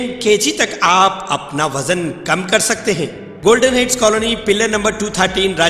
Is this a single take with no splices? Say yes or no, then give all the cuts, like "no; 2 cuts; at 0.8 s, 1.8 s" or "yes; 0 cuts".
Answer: no; 1 cut; at 3.2 s